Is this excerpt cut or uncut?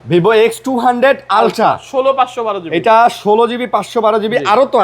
uncut